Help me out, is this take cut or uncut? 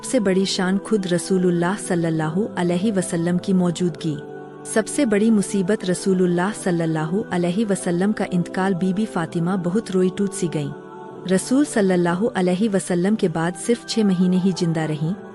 cut